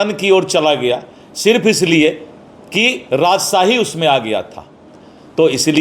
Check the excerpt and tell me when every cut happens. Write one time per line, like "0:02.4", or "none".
none